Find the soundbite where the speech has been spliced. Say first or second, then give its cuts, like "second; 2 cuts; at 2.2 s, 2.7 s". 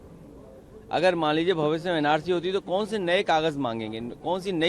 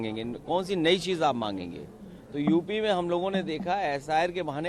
first; 1 cut; at 1.8 s